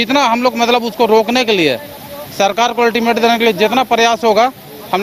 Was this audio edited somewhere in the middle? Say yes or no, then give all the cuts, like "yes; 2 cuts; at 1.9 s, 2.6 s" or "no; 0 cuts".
no; 0 cuts